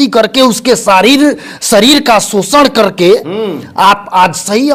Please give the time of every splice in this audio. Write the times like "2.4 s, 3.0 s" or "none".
none